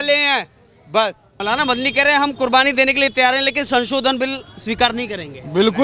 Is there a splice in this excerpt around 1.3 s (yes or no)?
yes